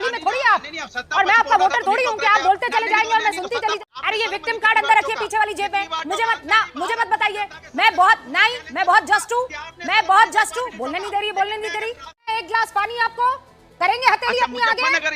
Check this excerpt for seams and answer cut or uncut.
cut